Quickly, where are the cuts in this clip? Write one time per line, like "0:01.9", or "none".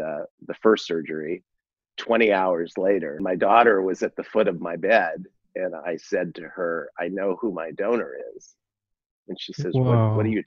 0:03.2

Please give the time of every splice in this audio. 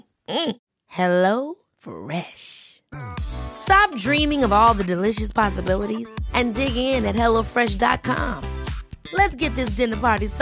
none

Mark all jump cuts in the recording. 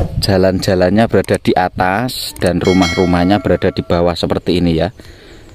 none

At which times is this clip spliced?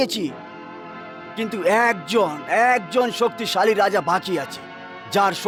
none

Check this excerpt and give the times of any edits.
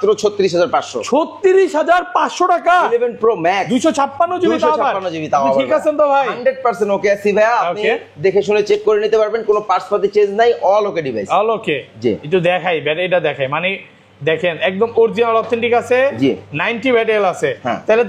none

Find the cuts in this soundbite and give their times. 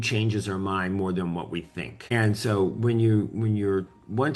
0:02.0

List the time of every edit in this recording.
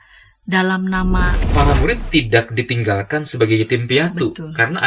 0:01.4

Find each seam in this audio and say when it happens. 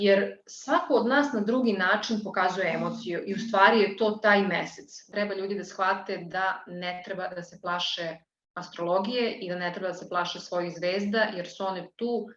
0:05.1

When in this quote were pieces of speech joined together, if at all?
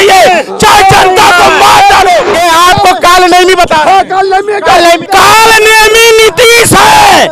0:02.3
0:05.0

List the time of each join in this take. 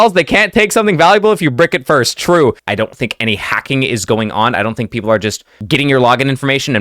0:02.6

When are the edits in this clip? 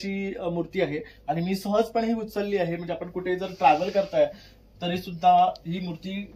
none

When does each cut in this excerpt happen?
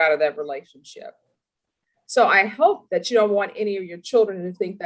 0:01.6

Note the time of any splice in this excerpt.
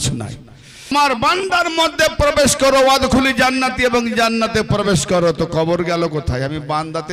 0:00.9

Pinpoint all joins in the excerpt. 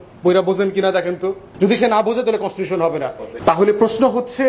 0:01.4
0:03.2

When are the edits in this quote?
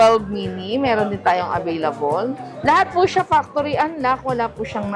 0:02.5

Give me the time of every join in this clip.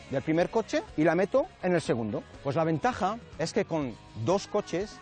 0:00.9
0:02.3

